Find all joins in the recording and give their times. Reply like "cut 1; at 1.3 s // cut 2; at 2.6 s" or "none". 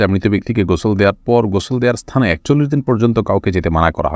none